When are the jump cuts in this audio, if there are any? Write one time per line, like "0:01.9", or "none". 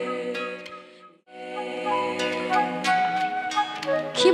0:01.4